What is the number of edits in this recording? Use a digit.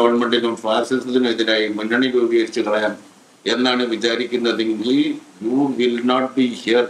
0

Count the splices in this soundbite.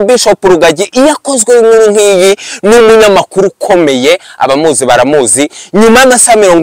0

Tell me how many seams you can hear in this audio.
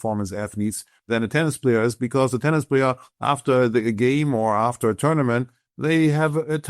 1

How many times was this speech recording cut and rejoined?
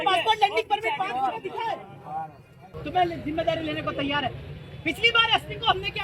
1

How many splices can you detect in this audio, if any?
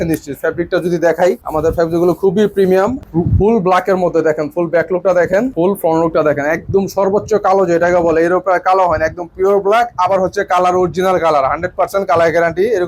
3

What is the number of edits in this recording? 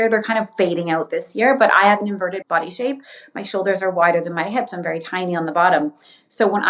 1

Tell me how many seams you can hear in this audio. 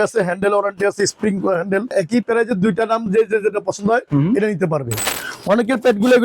2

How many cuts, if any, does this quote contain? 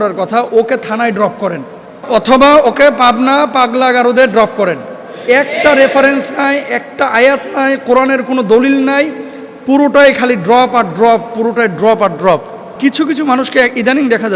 2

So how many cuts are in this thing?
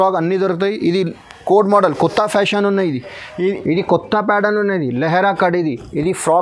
1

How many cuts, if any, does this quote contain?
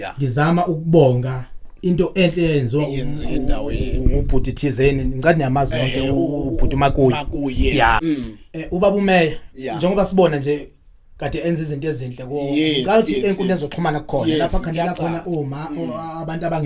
1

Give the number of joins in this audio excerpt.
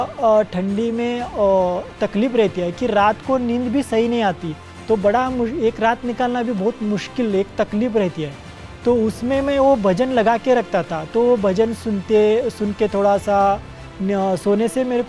0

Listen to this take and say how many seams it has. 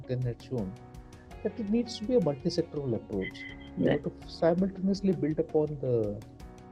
0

